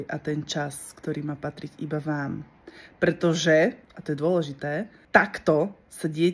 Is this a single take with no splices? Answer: no; 2 cuts; at 3.9 s, 4.9 s

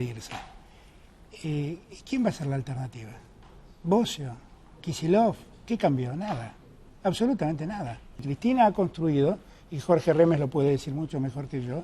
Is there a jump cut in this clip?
yes; 1 cut; at 8.3 s

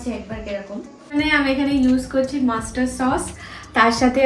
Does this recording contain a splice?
yes; 1 cut; at 1.1 s

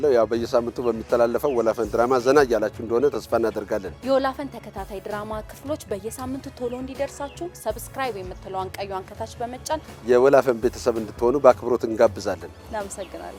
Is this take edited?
no; 0 cuts

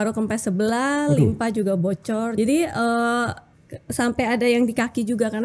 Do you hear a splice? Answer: yes; 1 cut; at 2.3 s

